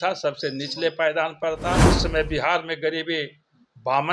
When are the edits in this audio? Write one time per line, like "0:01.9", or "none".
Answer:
0:01.9